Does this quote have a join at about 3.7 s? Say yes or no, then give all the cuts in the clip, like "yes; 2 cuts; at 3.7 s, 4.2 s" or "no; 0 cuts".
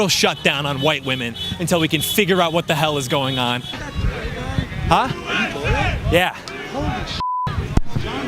yes; 1 cut; at 3.7 s